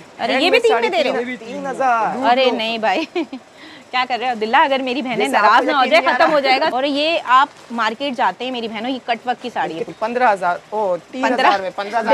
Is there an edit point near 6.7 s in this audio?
yes; 2 cuts; at 6.7 s, 9.9 s

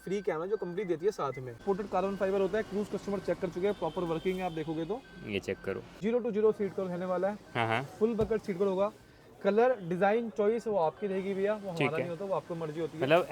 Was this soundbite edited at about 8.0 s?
no; 2 cuts; at 1.6 s, 6.0 s

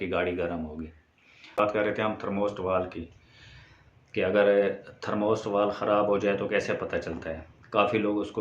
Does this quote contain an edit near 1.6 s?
yes; 1 cut; at 1.6 s

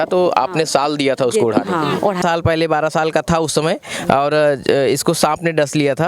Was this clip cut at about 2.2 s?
yes; 1 cut; at 2.2 s

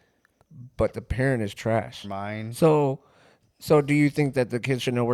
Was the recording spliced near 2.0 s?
yes; 1 cut; at 2.0 s

